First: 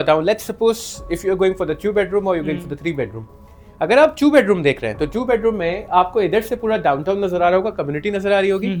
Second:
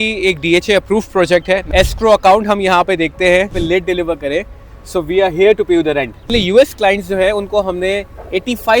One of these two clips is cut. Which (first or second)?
second